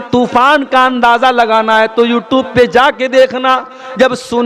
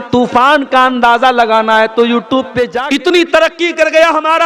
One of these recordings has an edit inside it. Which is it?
second; 1 cut; at 2.7 s

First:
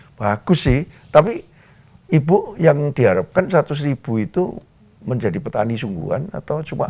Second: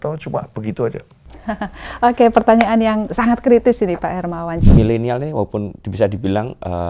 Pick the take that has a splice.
second; 1 cut; at 4.6 s

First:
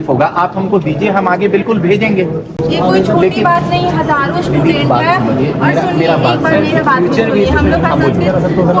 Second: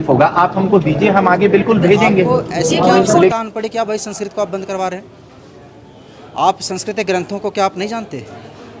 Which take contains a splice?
second; 1 cut; at 3.3 s

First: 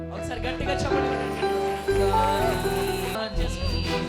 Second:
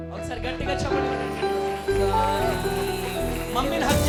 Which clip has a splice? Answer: first; 1 cut; at 3.2 s

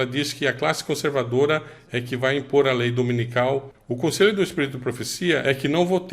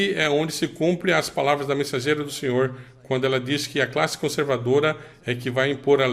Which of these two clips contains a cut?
first; 1 cut; at 3.7 s

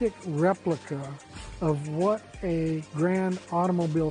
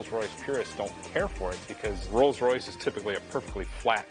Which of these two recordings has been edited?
first; 1 cut; at 2.9 s

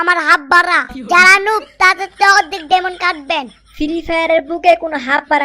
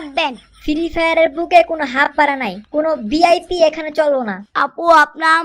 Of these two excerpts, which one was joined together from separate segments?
second; 1 cut; at 4.4 s

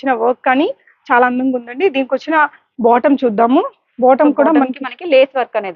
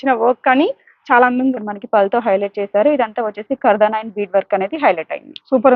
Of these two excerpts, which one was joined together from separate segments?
second; 1 cut; at 1.7 s

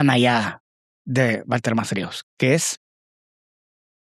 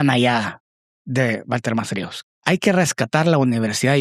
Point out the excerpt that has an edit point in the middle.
second; 1 cut; at 2.3 s

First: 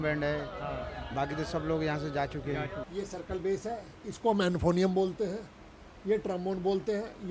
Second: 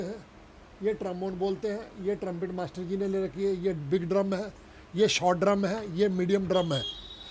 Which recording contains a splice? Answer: first; 1 cut; at 2.8 s

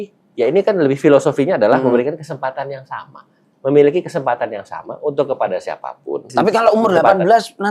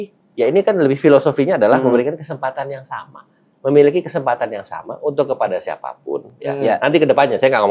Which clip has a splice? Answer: first; 1 cut; at 6.3 s

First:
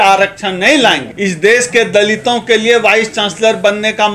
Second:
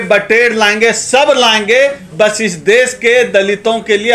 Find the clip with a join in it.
first; 1 cut; at 1.1 s

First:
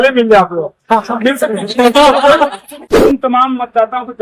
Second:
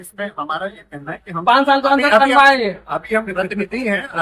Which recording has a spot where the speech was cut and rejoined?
first; 1 cut; at 3.0 s

